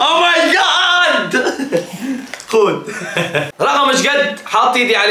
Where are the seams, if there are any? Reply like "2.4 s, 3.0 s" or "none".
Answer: 3.5 s